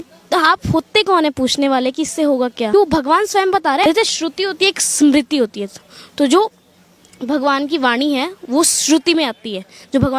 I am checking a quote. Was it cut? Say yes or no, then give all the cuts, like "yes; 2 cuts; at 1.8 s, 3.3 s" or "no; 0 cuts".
yes; 2 cuts; at 2.7 s, 3.8 s